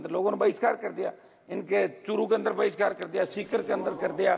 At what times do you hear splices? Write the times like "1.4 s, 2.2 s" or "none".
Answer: none